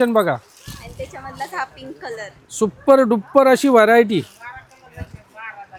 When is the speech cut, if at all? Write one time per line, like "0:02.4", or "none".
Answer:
none